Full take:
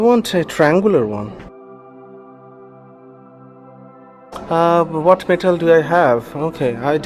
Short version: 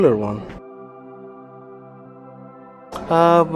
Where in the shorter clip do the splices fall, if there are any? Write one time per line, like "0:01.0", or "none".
0:02.1